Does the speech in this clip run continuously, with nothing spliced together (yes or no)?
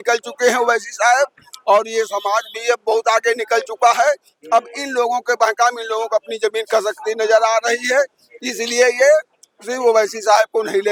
yes